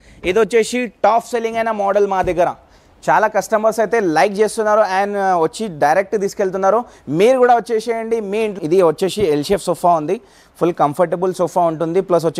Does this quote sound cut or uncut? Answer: cut